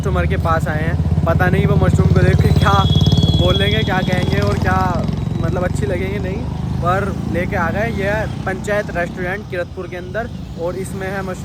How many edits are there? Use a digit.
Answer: 0